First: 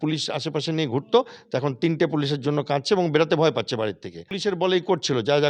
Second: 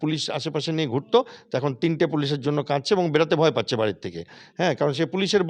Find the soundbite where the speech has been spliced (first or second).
first